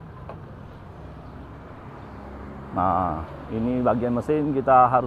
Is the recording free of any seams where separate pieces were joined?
yes; 0 cuts

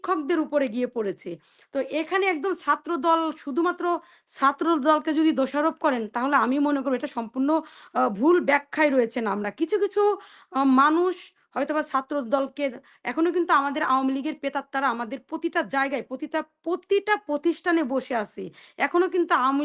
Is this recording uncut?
yes; 0 cuts

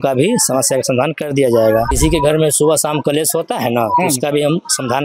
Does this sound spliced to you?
yes; 1 cut; at 1.9 s

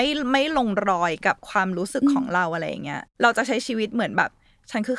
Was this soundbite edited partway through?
yes; 1 cut; at 3.0 s

